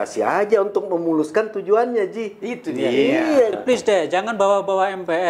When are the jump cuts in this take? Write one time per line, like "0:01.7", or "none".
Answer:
0:03.5